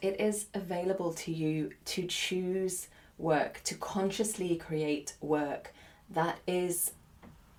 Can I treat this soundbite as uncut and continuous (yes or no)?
yes